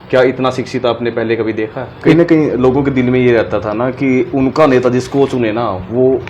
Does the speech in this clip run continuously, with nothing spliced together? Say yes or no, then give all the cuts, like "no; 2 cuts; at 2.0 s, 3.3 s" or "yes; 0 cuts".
no; 1 cut; at 2.1 s